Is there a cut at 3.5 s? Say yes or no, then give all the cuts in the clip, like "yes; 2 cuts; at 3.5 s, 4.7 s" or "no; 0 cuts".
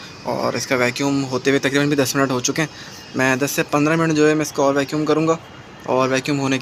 no; 0 cuts